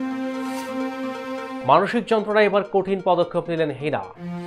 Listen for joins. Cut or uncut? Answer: uncut